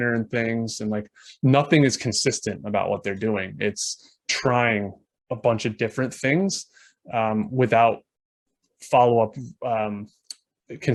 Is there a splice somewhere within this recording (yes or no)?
no